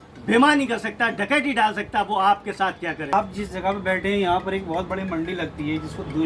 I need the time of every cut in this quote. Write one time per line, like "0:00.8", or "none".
none